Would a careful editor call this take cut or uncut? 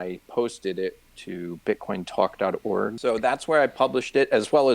cut